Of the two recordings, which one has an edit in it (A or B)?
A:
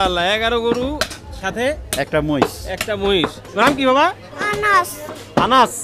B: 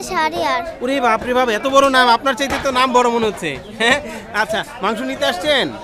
A